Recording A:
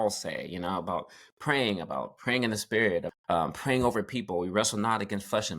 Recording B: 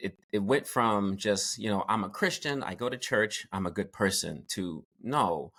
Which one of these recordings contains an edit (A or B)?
A